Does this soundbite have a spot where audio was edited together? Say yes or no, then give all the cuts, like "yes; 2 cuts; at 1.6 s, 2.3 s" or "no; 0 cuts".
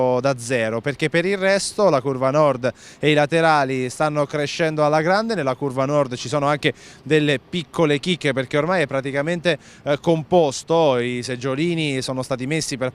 yes; 1 cut; at 11.4 s